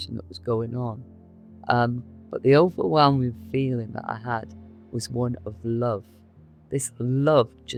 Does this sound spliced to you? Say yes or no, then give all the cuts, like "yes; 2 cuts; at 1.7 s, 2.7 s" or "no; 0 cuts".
no; 0 cuts